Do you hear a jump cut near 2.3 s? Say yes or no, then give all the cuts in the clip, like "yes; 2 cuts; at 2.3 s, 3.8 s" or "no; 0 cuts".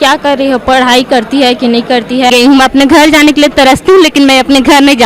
yes; 1 cut; at 2.3 s